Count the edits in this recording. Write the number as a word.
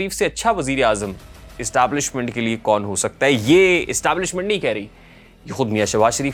zero